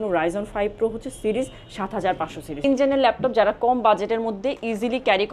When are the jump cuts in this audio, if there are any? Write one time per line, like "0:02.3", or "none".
0:02.6